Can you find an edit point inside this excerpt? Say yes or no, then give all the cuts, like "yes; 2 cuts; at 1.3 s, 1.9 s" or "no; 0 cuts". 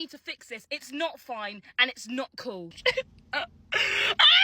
yes; 1 cut; at 2.7 s